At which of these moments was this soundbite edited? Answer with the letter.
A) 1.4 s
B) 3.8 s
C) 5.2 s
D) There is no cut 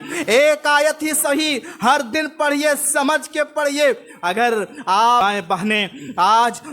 C